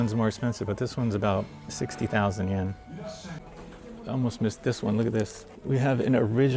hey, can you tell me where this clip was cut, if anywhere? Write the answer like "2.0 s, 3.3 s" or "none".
3.4 s, 5.5 s